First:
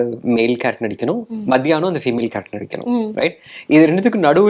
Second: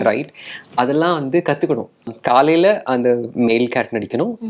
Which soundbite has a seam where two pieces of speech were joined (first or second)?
second